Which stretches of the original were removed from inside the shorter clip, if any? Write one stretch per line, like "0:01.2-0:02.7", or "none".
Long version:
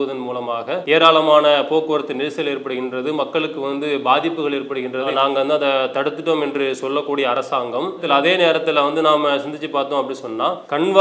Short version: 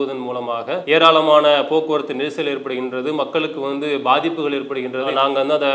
none